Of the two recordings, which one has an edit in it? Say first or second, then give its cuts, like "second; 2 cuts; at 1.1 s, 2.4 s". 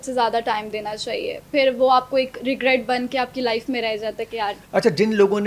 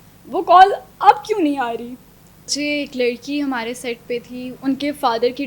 second; 2 cuts; at 2.5 s, 4.5 s